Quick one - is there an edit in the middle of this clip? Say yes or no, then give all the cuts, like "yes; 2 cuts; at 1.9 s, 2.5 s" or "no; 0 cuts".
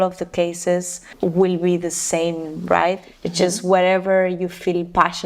yes; 2 cuts; at 1.0 s, 3.1 s